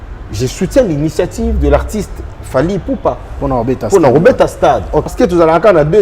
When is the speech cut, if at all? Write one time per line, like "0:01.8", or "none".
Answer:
0:05.1